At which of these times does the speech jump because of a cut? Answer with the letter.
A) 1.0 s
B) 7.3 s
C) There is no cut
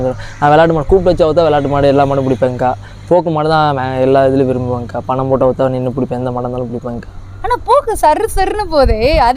C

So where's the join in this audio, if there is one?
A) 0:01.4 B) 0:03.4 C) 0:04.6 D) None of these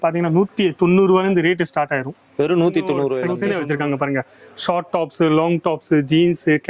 B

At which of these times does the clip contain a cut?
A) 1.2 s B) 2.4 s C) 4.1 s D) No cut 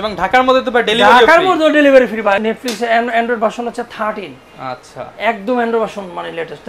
B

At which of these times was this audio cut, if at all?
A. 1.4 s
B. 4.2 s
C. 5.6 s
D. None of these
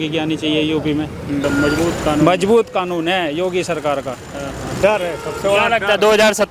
A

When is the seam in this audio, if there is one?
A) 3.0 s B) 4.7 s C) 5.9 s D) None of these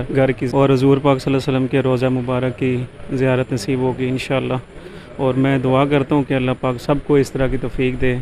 D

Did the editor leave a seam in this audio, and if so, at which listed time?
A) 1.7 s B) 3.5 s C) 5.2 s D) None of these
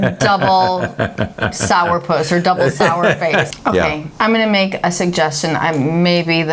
B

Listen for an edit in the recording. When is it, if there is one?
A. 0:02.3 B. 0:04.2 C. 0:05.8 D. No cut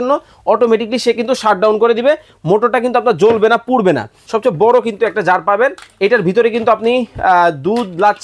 B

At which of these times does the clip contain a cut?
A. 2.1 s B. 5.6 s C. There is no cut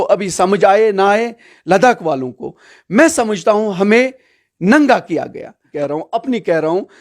B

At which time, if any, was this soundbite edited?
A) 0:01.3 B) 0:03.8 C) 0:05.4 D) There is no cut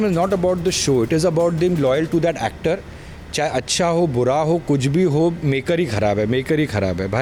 D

